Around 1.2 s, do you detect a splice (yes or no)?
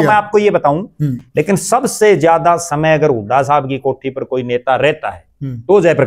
yes